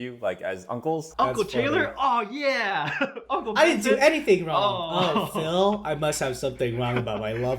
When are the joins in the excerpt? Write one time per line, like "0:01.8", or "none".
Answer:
0:01.1